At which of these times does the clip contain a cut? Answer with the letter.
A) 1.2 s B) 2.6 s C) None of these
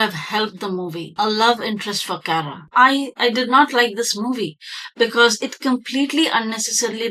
B